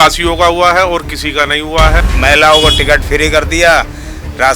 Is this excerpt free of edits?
no; 1 cut; at 2.1 s

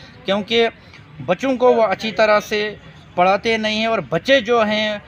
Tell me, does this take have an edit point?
no; 0 cuts

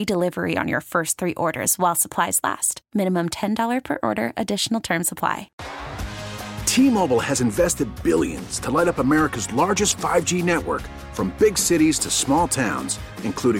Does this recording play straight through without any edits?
no; 1 cut; at 5.5 s

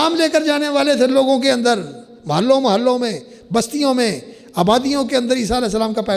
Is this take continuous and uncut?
yes; 0 cuts

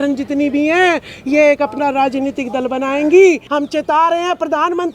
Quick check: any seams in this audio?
yes; 1 cut; at 3.4 s

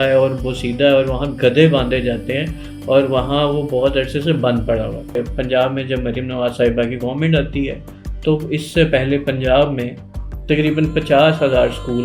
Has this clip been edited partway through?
yes; 1 cut; at 5.2 s

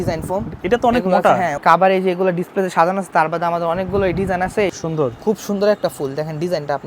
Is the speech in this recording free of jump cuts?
no; 2 cuts; at 1.6 s, 4.7 s

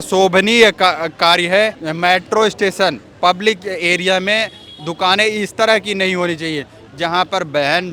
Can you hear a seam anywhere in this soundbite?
yes; 1 cut; at 1.8 s

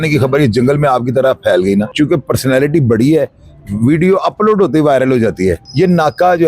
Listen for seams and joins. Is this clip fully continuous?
no; 2 cuts; at 1.9 s, 5.6 s

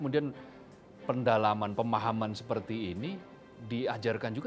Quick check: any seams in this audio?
no; 0 cuts

